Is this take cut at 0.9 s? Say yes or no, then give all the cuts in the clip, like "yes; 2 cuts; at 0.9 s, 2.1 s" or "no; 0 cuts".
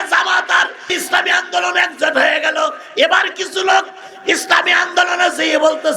yes; 1 cut; at 0.9 s